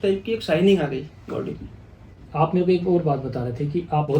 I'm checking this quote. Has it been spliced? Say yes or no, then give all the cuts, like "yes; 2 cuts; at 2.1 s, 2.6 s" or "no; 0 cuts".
no; 0 cuts